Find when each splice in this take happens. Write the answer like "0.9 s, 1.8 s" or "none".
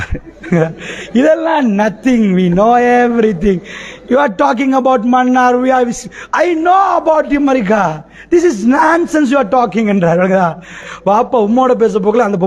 10.8 s